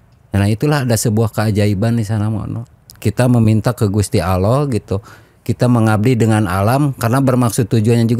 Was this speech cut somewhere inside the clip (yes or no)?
no